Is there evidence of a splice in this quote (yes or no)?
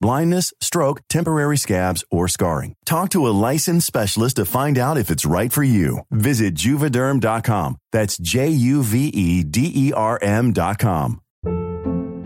no